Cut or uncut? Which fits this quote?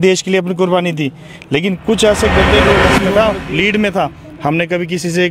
cut